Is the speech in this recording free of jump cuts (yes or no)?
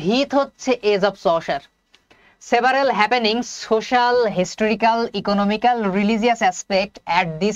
yes